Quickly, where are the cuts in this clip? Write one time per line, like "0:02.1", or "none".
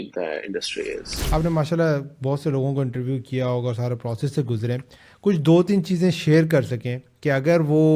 0:01.1

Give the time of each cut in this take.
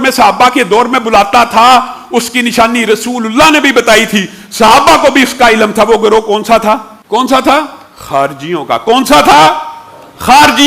0:06.9

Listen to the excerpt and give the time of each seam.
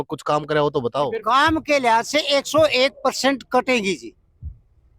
0:01.2

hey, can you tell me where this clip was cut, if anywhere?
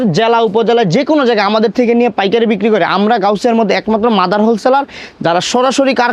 none

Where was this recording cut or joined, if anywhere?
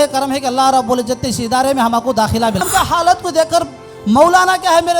0:02.7

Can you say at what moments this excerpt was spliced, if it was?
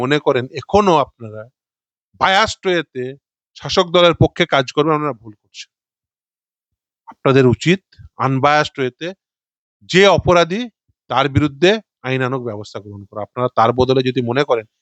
none

